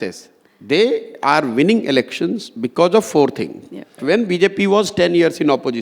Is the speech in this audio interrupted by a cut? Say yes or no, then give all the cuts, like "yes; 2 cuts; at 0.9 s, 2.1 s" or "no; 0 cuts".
yes; 1 cut; at 4.0 s